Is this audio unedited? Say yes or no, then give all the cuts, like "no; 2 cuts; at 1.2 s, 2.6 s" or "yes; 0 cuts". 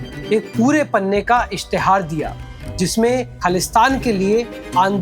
no; 1 cut; at 3.3 s